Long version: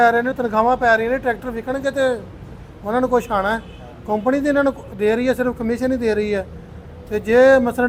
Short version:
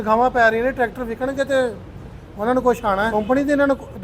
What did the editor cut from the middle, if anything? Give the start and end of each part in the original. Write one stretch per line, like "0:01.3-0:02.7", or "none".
0:03.6-0:04.1